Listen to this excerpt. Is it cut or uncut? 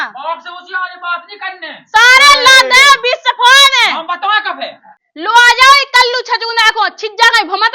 cut